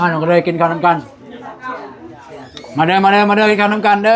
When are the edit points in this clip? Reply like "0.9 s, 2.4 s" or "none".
none